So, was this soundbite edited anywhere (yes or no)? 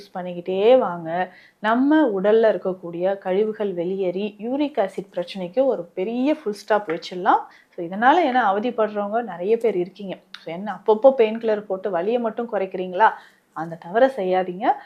no